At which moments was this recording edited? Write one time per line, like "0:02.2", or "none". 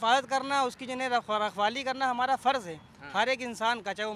none